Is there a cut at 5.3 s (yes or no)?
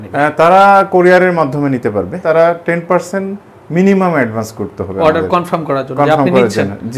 no